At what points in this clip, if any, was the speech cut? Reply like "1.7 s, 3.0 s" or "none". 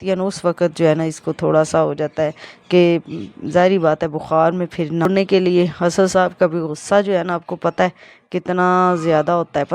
5.1 s